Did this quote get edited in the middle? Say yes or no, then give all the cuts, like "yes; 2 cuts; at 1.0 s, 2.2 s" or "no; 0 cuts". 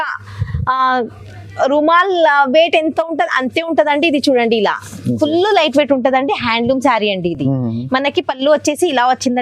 no; 0 cuts